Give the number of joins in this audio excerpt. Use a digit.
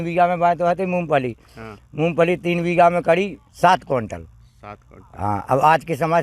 1